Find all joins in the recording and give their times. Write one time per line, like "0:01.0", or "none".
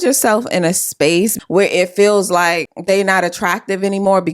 0:01.3
0:02.7